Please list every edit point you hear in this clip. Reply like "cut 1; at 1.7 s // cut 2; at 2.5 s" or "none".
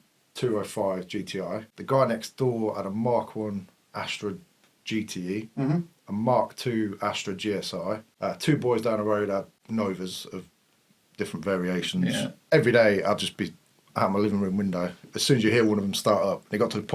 cut 1; at 1.7 s // cut 2; at 8.1 s // cut 3; at 9.6 s // cut 4; at 12.4 s